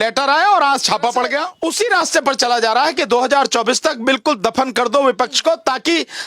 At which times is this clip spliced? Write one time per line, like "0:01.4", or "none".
0:01.5